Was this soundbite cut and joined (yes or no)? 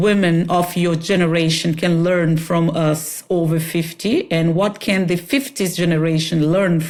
no